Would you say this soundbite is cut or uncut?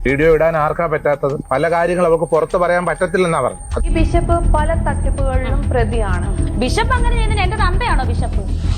cut